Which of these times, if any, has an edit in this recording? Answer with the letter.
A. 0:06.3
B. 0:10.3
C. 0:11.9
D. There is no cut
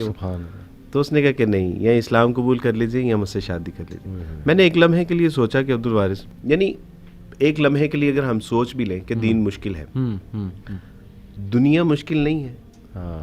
A